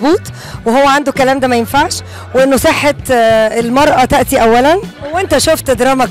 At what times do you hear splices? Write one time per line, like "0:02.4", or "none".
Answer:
0:05.0